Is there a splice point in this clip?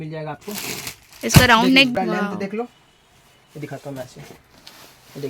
yes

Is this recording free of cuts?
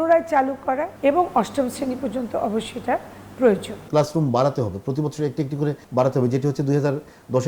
no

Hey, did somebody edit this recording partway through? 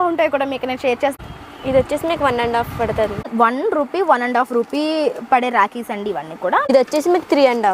yes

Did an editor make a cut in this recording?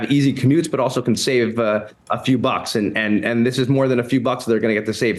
no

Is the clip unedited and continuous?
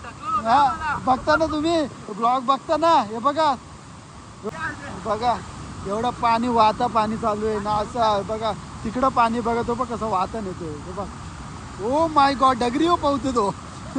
no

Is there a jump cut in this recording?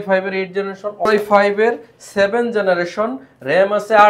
yes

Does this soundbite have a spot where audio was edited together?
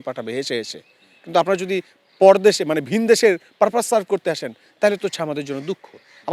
no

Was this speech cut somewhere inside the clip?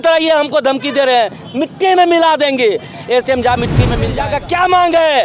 yes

